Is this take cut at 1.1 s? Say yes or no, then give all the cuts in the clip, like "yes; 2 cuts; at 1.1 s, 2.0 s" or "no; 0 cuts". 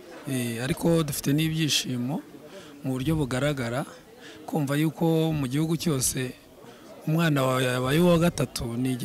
no; 0 cuts